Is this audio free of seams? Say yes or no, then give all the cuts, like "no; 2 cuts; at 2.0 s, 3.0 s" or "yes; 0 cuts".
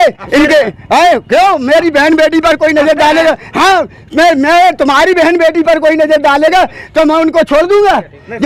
yes; 0 cuts